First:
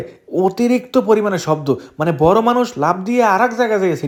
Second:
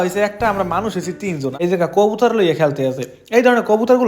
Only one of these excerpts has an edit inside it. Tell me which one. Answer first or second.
second